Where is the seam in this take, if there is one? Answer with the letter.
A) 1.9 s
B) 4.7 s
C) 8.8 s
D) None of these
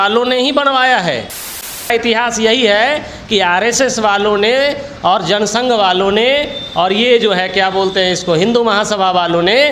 A